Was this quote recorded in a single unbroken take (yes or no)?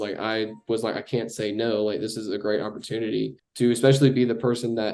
no